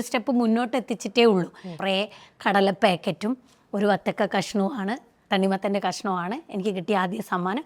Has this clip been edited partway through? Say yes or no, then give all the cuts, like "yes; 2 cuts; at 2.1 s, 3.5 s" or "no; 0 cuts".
yes; 1 cut; at 1.7 s